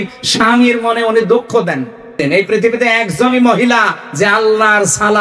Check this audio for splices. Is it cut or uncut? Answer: cut